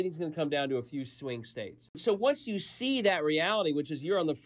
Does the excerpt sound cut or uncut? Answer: cut